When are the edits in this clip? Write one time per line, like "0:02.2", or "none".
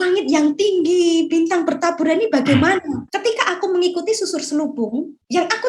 0:03.1